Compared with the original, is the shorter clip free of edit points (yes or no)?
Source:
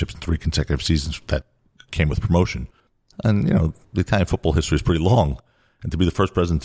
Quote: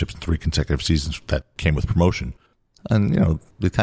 no